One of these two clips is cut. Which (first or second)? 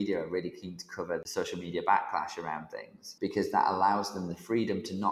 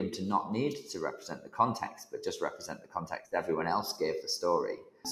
first